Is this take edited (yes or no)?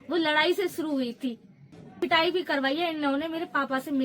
yes